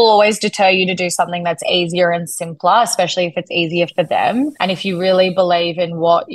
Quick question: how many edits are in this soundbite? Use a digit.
1